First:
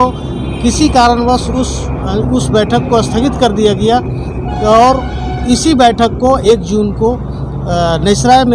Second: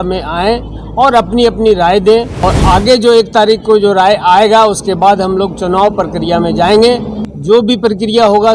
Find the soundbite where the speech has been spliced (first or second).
second